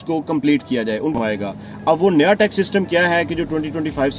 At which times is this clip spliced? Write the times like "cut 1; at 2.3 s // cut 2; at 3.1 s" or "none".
cut 1; at 1.2 s